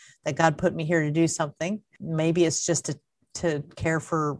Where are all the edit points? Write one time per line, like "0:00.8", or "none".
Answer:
0:01.9